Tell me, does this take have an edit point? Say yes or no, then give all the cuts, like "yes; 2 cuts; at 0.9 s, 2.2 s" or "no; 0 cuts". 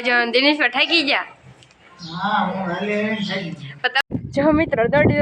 yes; 1 cut; at 4.0 s